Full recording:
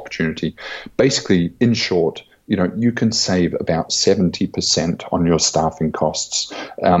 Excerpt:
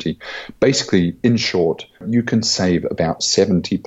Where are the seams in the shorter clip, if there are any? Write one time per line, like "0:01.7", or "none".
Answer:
0:02.0